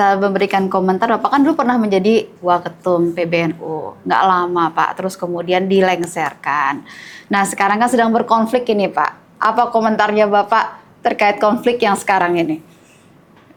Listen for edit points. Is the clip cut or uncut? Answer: uncut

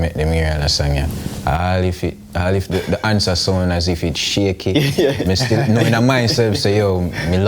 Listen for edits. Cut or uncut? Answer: uncut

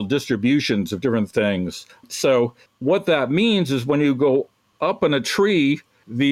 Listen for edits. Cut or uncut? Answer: uncut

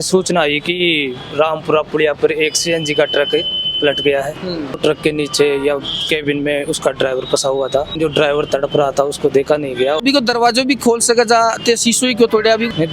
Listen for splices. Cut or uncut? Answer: cut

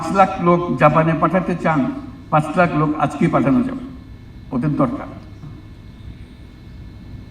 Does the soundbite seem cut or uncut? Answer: uncut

